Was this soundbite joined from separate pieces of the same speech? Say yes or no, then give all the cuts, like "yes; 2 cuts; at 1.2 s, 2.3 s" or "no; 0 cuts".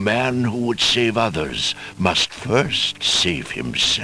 no; 0 cuts